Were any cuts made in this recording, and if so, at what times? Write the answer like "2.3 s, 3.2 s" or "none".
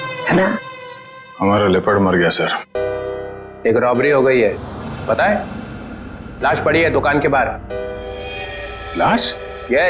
2.7 s